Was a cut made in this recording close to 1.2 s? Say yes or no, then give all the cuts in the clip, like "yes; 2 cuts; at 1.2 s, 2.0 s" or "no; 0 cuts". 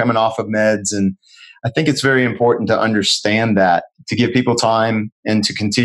no; 1 cut; at 3.9 s